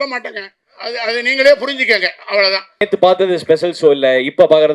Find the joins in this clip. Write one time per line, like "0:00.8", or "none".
0:02.8